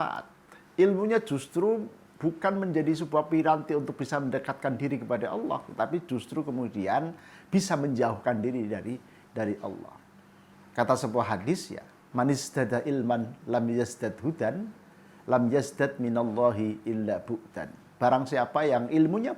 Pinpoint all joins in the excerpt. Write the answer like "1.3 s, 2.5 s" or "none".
none

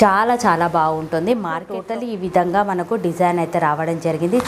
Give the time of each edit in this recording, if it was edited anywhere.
1.8 s

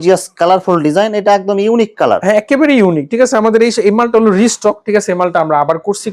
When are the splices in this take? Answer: none

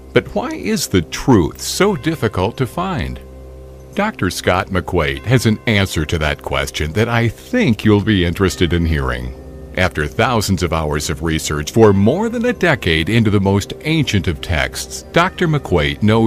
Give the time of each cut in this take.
6.1 s

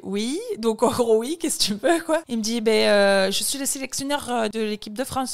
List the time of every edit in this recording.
none

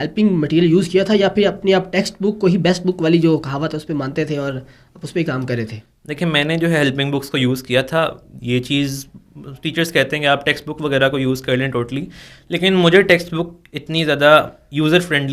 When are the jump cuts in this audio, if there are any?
none

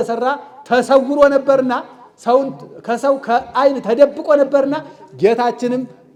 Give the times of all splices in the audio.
none

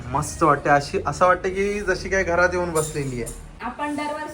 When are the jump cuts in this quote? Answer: 3.4 s

